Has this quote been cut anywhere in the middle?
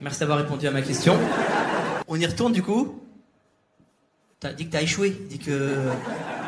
yes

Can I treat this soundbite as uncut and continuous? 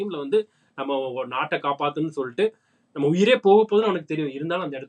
yes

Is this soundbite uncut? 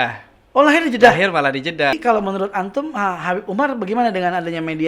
no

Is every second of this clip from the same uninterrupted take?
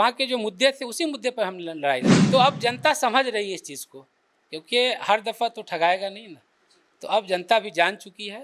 no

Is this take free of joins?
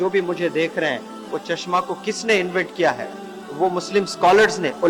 yes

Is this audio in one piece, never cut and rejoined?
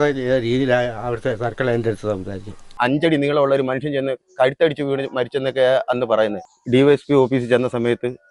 no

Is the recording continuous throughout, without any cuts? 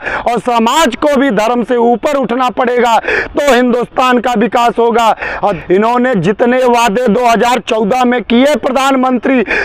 no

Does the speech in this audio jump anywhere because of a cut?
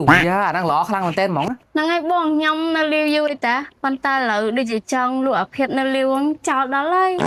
no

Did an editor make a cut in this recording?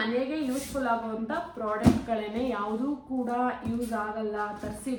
no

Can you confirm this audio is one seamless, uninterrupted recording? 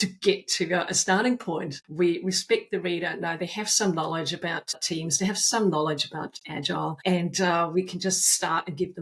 no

